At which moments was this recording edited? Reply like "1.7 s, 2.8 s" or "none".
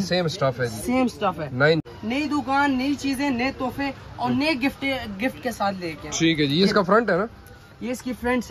1.8 s

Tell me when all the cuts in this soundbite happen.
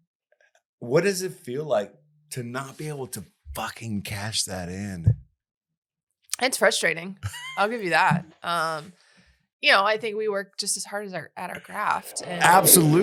none

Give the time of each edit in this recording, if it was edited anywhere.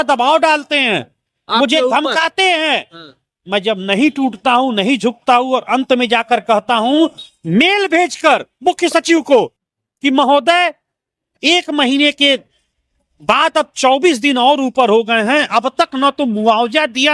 none

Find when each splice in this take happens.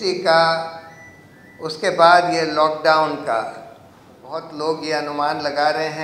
4.4 s

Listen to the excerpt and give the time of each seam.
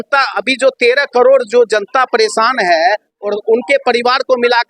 none

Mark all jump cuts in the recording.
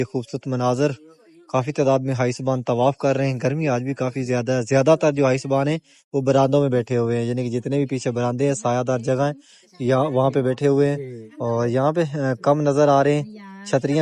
none

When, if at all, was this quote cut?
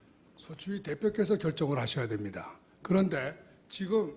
none

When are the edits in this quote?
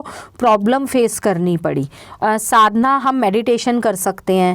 2.0 s

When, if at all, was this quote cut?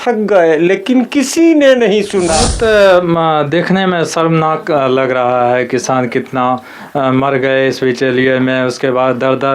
2.4 s

